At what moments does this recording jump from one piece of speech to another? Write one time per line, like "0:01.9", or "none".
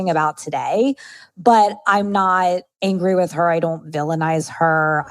0:02.7